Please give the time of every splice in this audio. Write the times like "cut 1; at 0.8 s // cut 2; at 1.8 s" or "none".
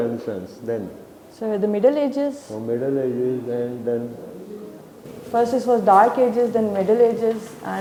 none